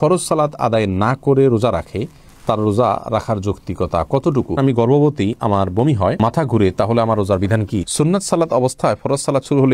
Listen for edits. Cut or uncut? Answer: cut